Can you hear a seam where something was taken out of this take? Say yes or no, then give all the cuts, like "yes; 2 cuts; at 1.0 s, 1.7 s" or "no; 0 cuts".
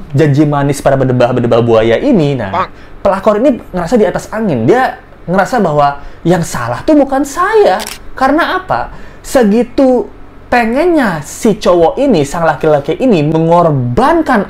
yes; 1 cut; at 13.3 s